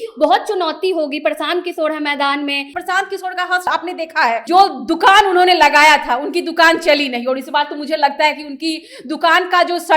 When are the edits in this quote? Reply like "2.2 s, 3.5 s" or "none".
2.7 s, 3.9 s